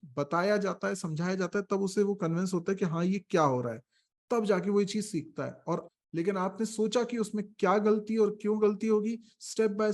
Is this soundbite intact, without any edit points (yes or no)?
no